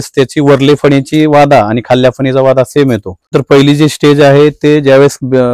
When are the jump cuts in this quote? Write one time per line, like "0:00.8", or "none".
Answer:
0:03.3